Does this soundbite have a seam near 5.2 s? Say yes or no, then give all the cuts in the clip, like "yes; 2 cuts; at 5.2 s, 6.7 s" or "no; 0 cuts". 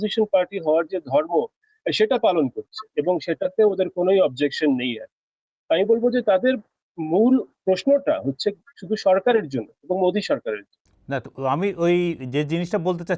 no; 0 cuts